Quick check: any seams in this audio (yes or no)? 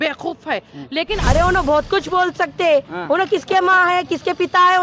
yes